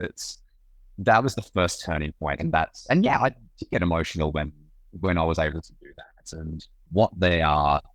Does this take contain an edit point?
yes; 1 cut; at 6.8 s

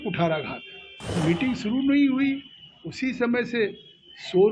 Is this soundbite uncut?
no; 1 cut; at 1.0 s

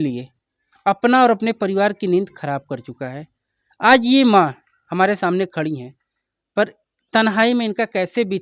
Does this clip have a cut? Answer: no; 0 cuts

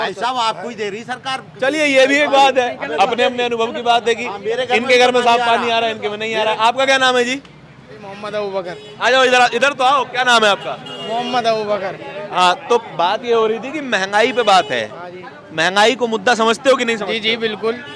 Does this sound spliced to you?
no; 0 cuts

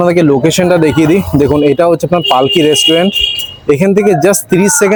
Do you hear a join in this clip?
no; 0 cuts

